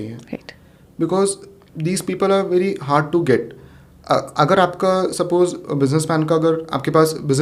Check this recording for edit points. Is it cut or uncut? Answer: uncut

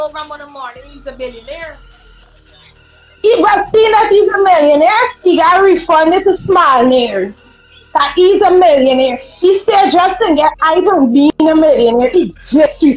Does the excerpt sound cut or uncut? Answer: uncut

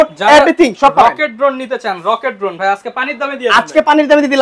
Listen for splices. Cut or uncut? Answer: uncut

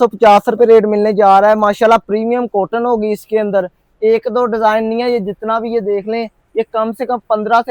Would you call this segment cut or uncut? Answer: uncut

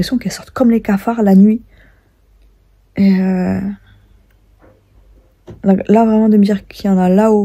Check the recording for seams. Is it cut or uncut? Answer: uncut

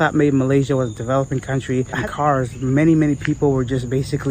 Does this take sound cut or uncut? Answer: cut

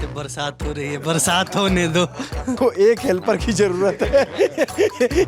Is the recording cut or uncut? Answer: cut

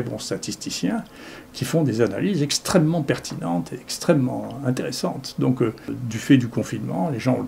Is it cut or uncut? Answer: cut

